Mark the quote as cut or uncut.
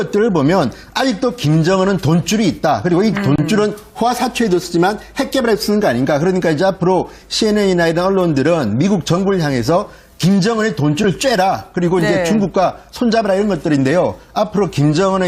uncut